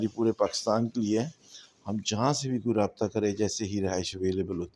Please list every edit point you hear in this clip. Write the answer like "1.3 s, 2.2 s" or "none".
none

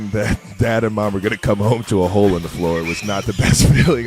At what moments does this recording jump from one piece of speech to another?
none

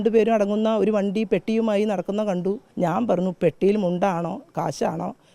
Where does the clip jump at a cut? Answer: 2.6 s

